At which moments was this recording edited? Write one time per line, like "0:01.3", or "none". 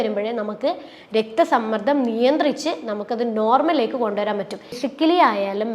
0:04.8